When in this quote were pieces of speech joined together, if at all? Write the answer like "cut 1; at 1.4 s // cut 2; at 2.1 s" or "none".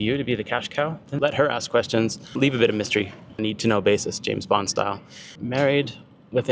cut 1; at 1.1 s // cut 2; at 2.3 s // cut 3; at 5.3 s